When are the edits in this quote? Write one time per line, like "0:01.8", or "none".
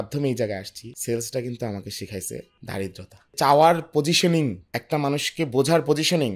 0:03.3